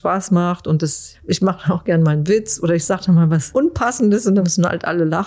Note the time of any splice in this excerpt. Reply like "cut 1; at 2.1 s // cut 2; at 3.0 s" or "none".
cut 1; at 1.1 s // cut 2; at 4.4 s

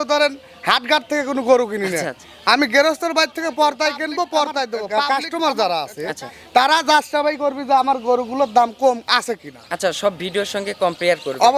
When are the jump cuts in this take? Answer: cut 1; at 4.9 s

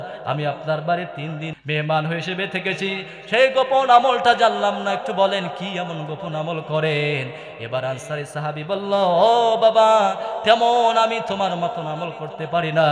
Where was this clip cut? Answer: cut 1; at 1.5 s

